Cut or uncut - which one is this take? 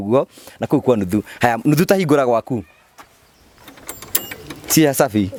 uncut